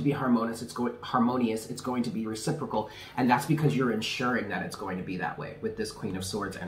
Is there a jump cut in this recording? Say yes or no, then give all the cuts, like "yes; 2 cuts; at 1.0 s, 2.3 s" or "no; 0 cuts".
no; 0 cuts